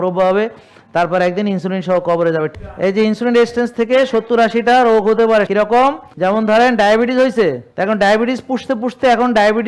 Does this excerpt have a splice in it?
yes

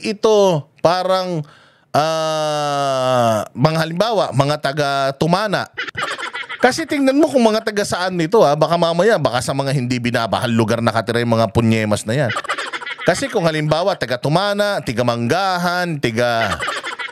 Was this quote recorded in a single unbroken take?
yes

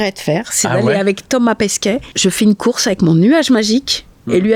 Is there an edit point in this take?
yes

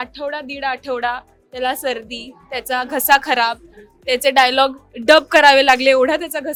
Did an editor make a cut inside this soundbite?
no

